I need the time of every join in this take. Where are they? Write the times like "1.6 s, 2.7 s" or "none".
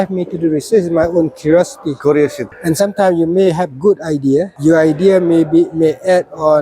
2.5 s, 4.5 s